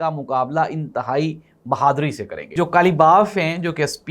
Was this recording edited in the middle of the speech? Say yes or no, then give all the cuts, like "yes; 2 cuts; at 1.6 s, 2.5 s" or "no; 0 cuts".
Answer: yes; 1 cut; at 2.5 s